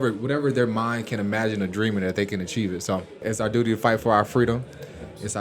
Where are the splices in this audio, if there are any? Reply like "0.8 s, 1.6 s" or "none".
3.2 s